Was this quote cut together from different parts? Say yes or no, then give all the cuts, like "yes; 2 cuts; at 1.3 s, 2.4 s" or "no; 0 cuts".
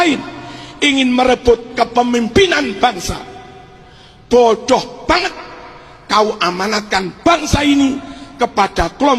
no; 0 cuts